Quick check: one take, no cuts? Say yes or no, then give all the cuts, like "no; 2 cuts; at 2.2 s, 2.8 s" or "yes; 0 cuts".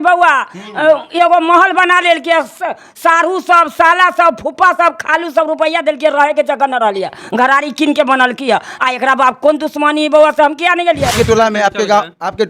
no; 1 cut; at 11.1 s